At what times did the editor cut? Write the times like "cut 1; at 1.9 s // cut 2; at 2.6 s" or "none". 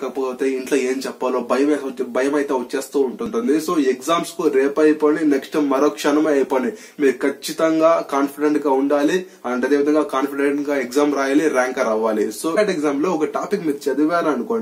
cut 1; at 3.3 s // cut 2; at 12.6 s